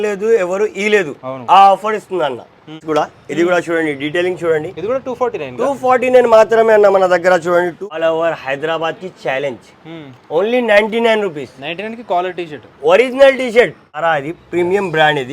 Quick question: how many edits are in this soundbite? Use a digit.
3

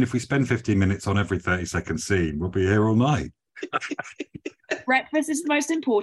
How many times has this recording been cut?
0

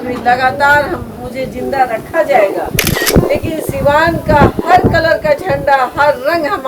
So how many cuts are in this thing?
1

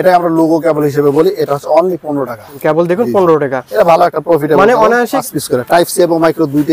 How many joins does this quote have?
2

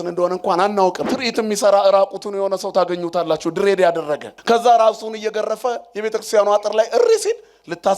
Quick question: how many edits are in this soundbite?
2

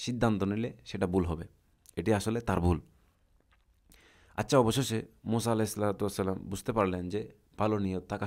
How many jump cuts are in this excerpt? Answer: 0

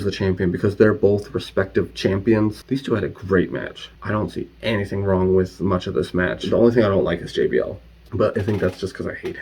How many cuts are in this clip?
1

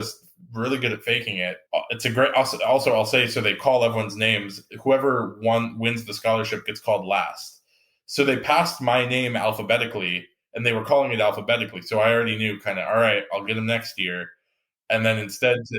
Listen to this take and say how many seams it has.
1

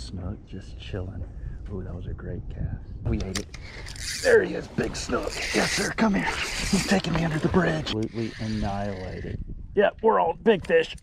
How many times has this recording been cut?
2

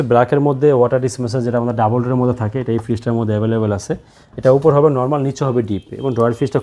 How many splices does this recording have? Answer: 0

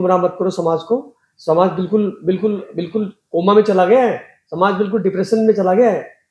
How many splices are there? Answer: 0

